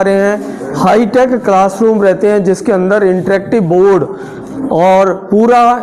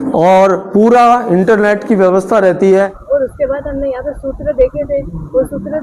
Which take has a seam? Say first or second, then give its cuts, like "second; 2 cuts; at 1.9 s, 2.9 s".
second; 1 cut; at 3.0 s